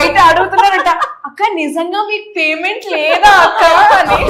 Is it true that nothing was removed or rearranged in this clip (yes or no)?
yes